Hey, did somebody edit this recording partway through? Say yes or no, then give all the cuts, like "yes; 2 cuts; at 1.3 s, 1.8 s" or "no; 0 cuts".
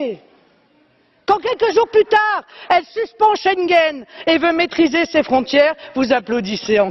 yes; 1 cut; at 4.1 s